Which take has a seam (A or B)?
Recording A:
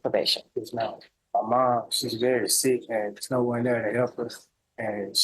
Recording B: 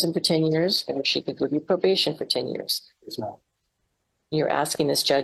A